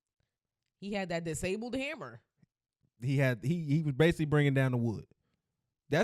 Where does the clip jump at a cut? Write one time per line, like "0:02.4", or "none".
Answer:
none